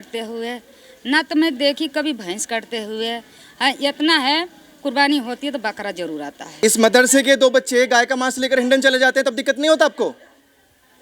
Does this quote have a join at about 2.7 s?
no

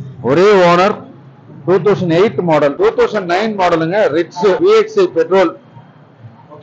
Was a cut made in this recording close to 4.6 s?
yes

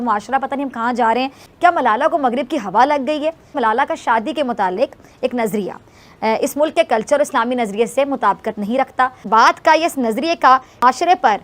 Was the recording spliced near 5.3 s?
no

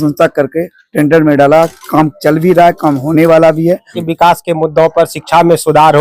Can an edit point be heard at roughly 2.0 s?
no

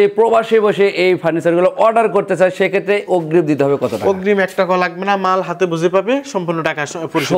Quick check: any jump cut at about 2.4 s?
no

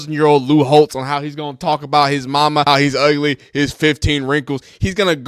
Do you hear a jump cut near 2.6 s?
yes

